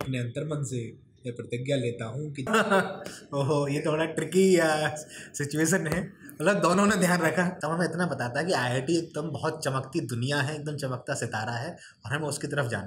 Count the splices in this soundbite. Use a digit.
2